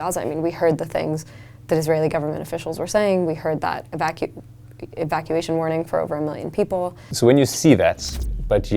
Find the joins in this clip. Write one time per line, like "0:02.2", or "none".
0:07.1